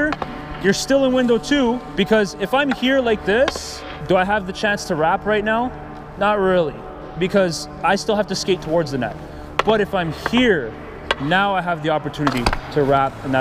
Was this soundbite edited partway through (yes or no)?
no